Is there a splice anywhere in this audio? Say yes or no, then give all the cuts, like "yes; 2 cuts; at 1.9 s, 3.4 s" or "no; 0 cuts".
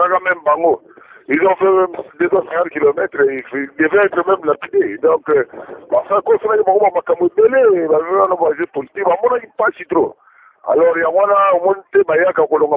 no; 0 cuts